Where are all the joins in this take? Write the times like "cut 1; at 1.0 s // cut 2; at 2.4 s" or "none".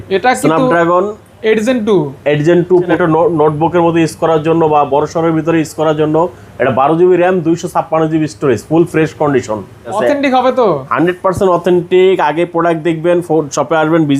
cut 1; at 2.9 s // cut 2; at 10.0 s